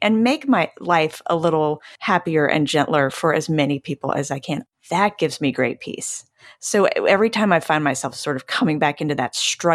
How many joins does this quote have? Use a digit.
2